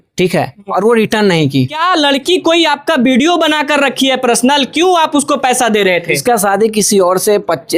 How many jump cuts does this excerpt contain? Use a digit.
2